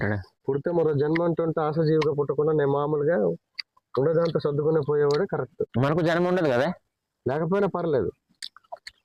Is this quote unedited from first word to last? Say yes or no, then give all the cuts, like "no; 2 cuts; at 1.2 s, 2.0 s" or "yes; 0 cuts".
no; 1 cut; at 5.7 s